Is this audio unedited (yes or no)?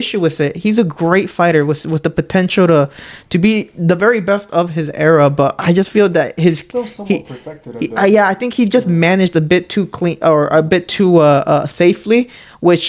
yes